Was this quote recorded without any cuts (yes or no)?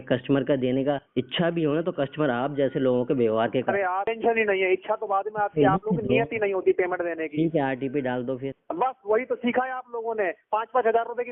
no